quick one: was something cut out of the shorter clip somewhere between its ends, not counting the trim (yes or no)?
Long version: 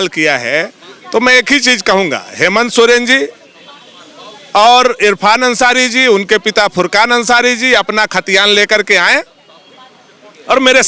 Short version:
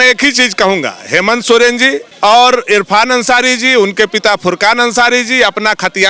yes